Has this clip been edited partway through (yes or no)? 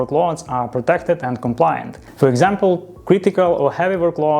yes